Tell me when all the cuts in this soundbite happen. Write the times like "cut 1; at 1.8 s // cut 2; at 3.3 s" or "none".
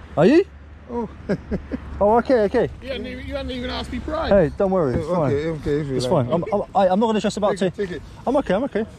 none